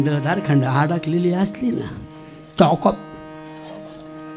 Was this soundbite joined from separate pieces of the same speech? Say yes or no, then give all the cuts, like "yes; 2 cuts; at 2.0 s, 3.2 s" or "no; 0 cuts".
no; 0 cuts